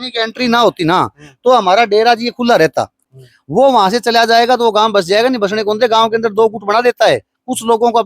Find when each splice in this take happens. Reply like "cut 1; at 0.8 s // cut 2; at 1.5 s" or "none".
cut 1; at 3.1 s